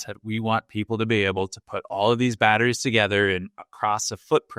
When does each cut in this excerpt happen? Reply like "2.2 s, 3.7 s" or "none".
none

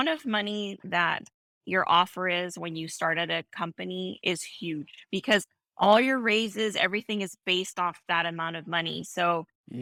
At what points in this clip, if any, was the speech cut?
none

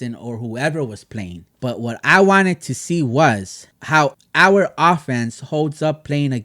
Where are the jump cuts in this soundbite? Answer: 1.4 s

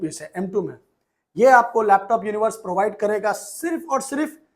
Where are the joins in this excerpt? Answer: none

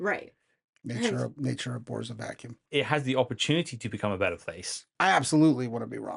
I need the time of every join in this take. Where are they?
2.7 s, 4.8 s

